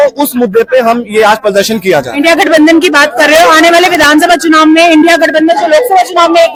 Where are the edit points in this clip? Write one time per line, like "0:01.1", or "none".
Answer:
none